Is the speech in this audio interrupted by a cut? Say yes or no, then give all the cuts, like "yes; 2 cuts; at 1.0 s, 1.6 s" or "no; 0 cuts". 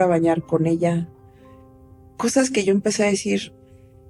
no; 0 cuts